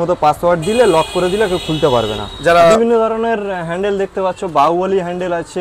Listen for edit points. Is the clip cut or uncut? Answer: cut